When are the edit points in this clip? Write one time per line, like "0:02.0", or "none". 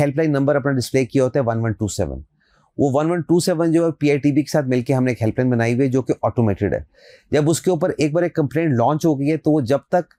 none